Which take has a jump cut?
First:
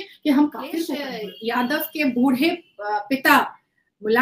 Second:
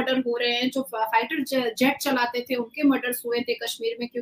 first; 1 cut; at 1.3 s

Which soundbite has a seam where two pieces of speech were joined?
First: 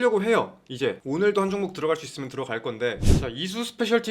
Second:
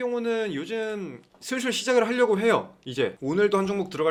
first; 1 cut; at 3.0 s

